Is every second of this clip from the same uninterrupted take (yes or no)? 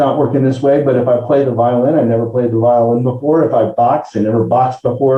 yes